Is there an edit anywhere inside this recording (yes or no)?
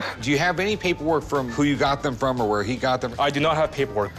no